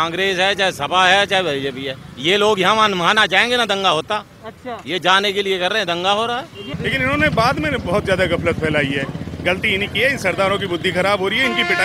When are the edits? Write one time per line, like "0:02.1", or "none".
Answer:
0:06.6